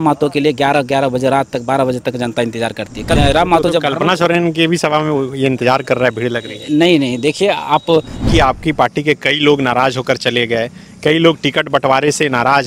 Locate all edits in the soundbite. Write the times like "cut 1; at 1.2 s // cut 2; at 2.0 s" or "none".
cut 1; at 3.2 s // cut 2; at 8.2 s